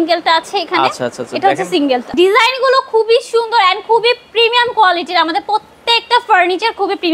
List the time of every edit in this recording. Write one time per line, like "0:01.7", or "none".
0:02.1